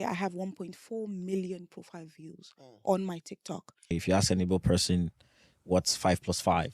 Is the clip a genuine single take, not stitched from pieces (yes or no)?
no